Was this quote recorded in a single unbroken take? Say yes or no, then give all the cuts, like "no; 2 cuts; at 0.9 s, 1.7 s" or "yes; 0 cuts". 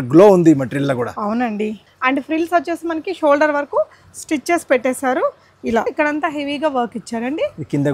no; 2 cuts; at 1.9 s, 5.9 s